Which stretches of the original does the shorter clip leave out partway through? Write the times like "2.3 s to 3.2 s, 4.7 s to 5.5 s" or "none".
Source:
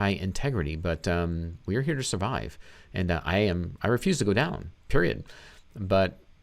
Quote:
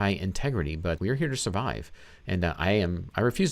1.0 s to 1.7 s